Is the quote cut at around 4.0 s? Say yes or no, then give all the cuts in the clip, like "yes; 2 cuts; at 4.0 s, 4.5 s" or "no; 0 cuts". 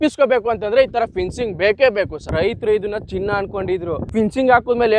yes; 2 cuts; at 2.2 s, 4.0 s